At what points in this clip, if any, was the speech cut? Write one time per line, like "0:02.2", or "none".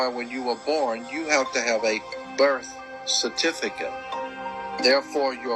0:04.3